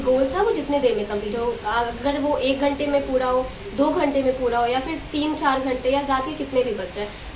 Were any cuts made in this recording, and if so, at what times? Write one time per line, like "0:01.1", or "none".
none